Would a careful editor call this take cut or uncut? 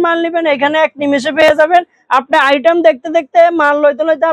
uncut